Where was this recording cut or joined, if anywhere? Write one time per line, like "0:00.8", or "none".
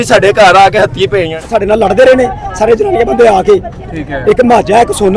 0:01.5